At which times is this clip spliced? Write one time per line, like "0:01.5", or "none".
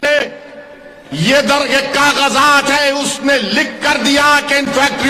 none